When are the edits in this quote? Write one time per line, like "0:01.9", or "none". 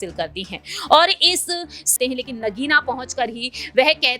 0:01.8